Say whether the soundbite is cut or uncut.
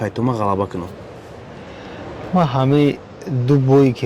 uncut